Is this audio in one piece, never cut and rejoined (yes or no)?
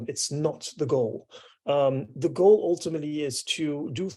yes